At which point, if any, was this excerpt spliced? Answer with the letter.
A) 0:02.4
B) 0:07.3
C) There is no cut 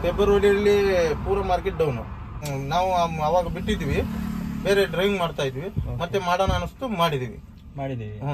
A